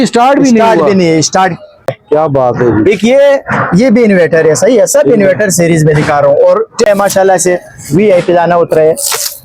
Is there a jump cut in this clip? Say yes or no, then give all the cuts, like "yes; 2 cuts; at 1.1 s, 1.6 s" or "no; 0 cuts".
yes; 2 cuts; at 2.0 s, 6.8 s